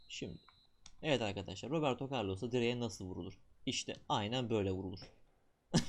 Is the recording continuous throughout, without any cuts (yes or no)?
yes